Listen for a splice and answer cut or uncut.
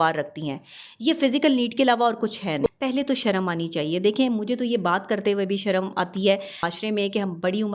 cut